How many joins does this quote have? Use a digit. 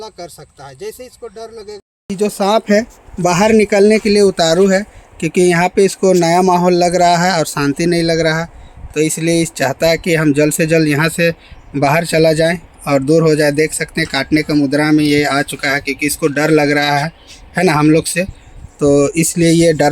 1